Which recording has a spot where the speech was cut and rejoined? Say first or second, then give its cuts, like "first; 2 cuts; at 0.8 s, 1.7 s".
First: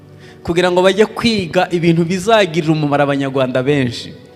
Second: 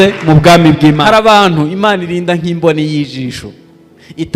second; 1 cut; at 1.0 s